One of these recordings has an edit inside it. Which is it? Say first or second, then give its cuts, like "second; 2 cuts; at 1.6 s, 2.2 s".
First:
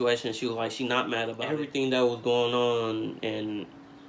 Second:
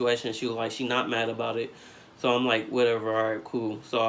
first; 1 cut; at 1.4 s